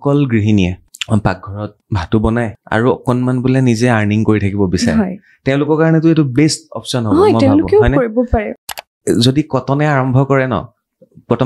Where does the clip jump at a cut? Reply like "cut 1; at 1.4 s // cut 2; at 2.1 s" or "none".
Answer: cut 1; at 0.8 s // cut 2; at 1.8 s // cut 3; at 2.6 s // cut 4; at 8.6 s